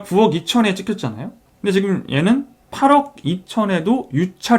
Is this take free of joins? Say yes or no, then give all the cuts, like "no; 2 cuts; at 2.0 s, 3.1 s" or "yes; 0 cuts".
no; 1 cut; at 1.4 s